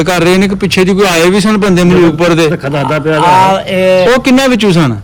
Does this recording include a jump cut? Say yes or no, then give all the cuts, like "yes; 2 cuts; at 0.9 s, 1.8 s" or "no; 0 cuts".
no; 0 cuts